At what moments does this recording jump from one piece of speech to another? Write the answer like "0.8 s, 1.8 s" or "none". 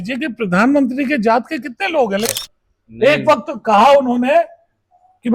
2.3 s